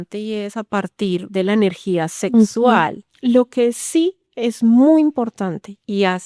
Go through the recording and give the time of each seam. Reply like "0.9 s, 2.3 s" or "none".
3.0 s

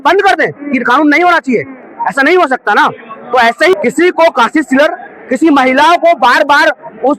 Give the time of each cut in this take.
3.7 s

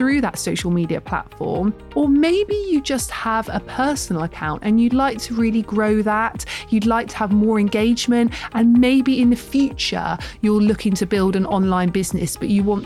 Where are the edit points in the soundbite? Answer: 1.8 s

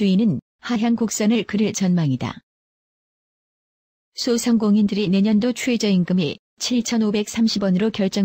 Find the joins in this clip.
1.1 s

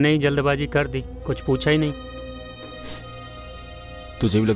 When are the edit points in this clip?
none

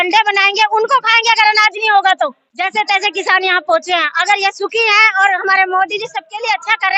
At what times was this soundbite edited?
2.5 s

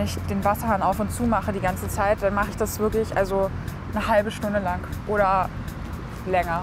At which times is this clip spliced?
4.9 s

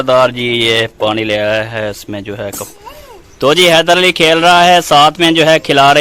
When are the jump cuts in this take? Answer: 2.7 s

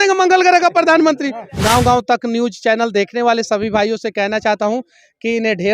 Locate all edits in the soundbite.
1.5 s

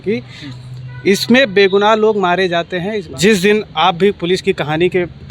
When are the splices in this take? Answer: 3.0 s

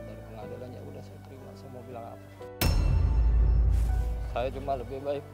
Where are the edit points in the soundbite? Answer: 4.1 s

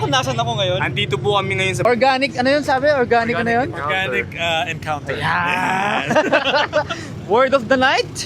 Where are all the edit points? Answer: 1.8 s

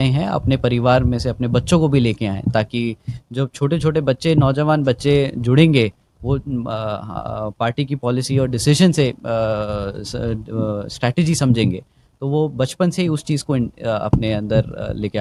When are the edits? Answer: none

